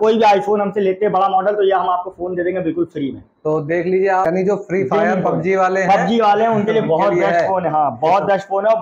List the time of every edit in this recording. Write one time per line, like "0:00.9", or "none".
0:04.4